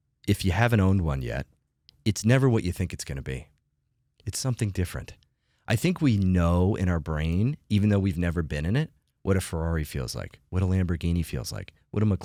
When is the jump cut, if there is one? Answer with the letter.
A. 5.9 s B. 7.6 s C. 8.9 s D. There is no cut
D